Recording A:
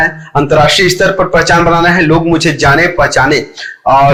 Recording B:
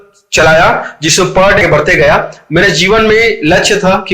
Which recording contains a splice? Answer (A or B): B